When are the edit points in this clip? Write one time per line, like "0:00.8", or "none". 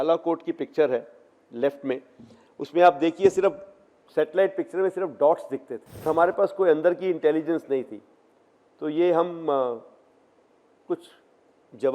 0:06.0